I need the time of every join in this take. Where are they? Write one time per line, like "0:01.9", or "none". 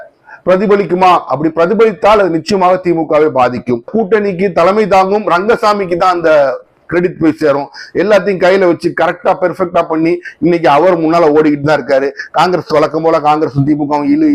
0:03.9